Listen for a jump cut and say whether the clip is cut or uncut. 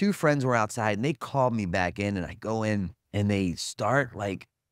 cut